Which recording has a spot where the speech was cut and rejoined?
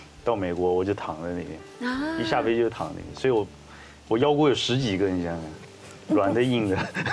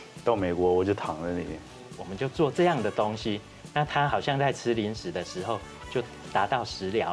second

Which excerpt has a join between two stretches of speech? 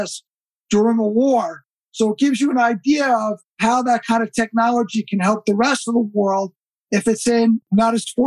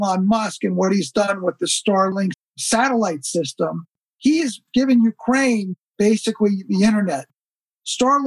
second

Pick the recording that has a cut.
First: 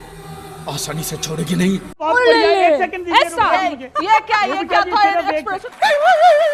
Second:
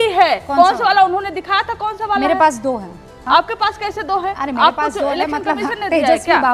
first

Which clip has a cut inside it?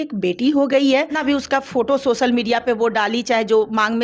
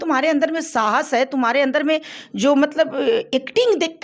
first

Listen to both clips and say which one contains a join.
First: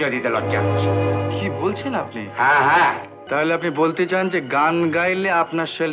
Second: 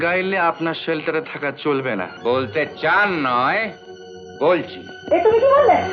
first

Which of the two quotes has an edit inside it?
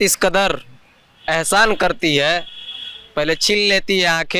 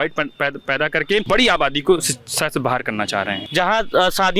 second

